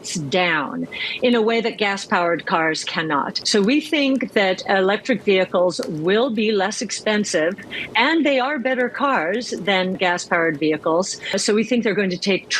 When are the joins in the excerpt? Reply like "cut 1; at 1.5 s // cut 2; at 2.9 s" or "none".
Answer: cut 1; at 3.4 s // cut 2; at 10.0 s // cut 3; at 11.4 s